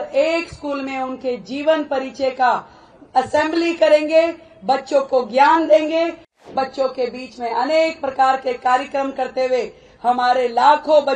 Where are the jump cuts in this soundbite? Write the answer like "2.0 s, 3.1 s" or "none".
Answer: 6.5 s

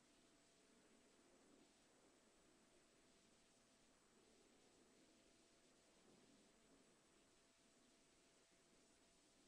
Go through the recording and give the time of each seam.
6.2 s

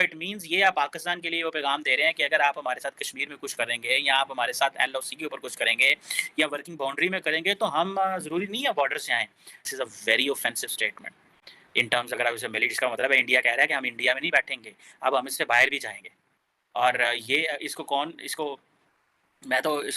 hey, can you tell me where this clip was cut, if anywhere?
none

